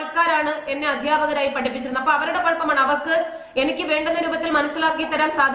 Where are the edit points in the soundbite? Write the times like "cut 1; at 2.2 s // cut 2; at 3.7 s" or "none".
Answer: none